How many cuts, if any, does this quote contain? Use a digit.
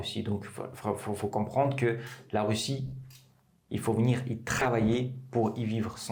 0